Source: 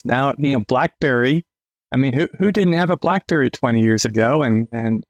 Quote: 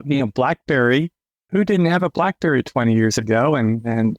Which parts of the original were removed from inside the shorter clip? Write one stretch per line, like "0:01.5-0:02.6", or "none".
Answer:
0:01.8-0:02.3